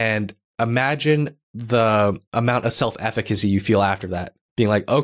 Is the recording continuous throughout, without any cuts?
no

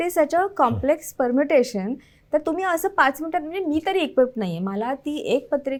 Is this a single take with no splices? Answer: yes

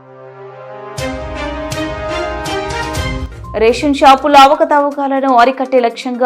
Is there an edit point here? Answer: yes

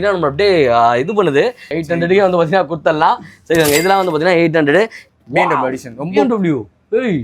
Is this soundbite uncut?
no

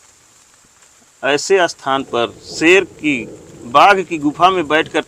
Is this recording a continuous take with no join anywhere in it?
yes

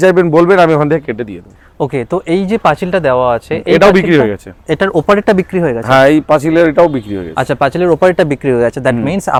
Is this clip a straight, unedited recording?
yes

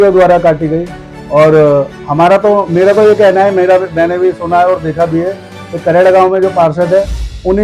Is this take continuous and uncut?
yes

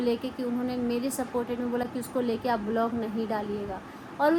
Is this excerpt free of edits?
yes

